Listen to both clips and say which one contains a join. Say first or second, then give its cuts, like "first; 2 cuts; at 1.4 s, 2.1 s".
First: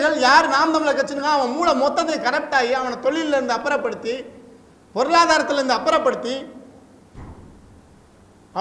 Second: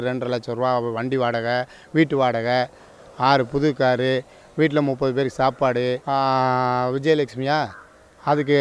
second; 1 cut; at 6.0 s